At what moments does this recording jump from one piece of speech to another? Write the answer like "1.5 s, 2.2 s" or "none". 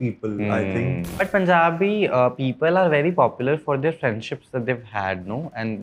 1.1 s